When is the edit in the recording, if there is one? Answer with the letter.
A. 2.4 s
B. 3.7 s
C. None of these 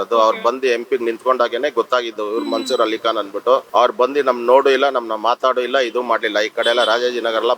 B